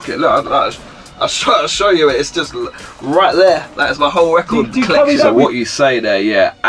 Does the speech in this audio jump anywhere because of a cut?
yes; 1 cut; at 5.3 s

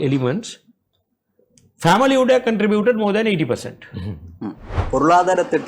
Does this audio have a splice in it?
yes; 1 cut; at 4.7 s

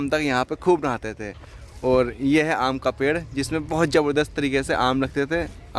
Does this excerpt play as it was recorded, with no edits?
yes; 0 cuts

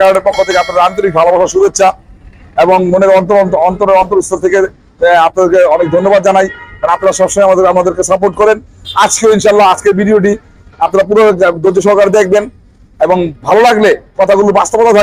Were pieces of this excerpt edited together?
no; 0 cuts

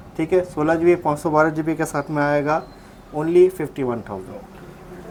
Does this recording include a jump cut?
no; 0 cuts

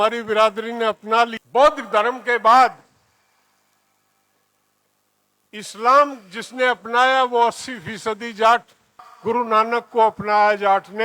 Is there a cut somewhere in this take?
yes; 2 cuts; at 1.4 s, 9.1 s

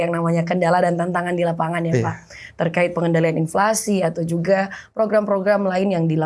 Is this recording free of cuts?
yes; 0 cuts

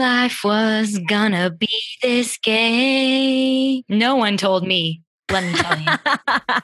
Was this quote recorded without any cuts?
no; 1 cut; at 5.5 s

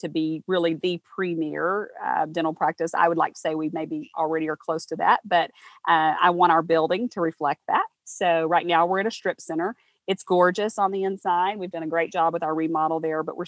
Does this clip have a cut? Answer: no; 0 cuts

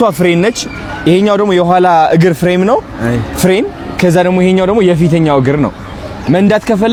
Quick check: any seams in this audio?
no; 0 cuts

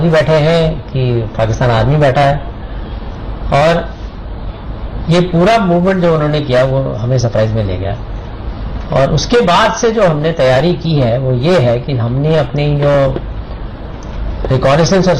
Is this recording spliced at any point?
yes; 1 cut; at 5.5 s

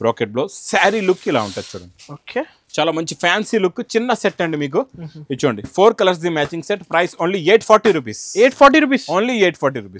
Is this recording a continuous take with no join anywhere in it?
yes; 0 cuts

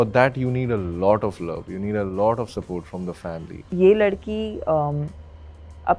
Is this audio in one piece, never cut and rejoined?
no; 1 cut; at 3.5 s

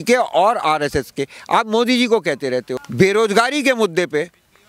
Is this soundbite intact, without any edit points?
no; 1 cut; at 2.8 s

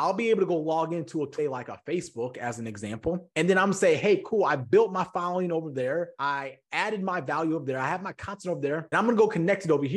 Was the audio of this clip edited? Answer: yes; 3 cuts; at 1.3 s, 6.1 s, 8.9 s

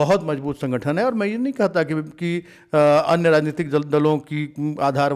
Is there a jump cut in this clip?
no; 0 cuts

